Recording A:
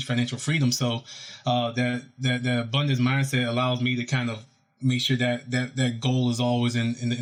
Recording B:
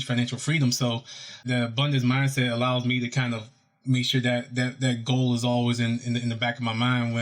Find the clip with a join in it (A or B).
B